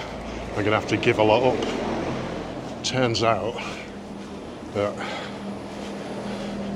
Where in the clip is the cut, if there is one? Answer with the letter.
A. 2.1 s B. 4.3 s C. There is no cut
C